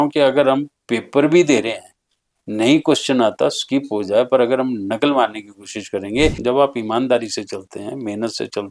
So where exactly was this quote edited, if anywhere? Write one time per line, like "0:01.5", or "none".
0:06.4